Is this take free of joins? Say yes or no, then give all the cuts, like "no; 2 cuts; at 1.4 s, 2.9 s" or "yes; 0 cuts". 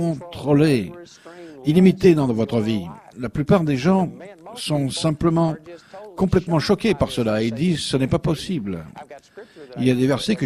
yes; 0 cuts